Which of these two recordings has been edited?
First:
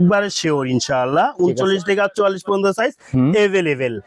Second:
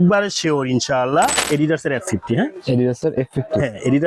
second; 1 cut; at 1.3 s

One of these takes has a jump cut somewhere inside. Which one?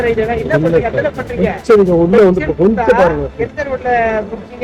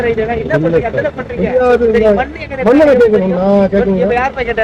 second; 1 cut; at 1.5 s

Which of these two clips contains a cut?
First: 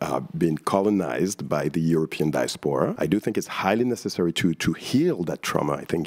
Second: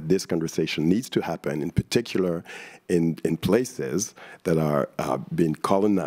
first; 1 cut; at 2.9 s

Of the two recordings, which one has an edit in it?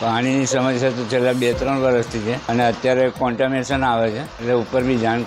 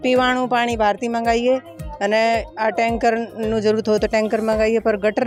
first; 2 cuts; at 2.4 s, 4.3 s

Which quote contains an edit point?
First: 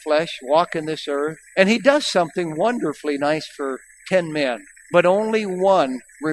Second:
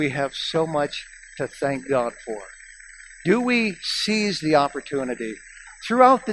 first; 2 cuts; at 1.4 s, 4.7 s

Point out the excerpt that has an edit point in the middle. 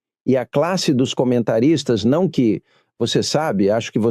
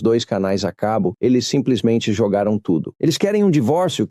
second; 1 cut; at 2.9 s

